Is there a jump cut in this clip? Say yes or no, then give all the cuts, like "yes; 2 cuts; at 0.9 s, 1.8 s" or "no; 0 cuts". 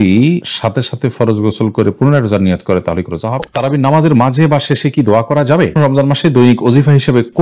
yes; 2 cuts; at 3.4 s, 5.8 s